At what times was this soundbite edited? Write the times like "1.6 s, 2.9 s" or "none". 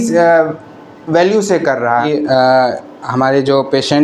2.1 s